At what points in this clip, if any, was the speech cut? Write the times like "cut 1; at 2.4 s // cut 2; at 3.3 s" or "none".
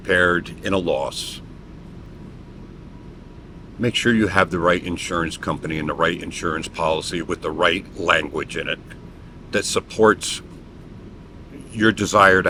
none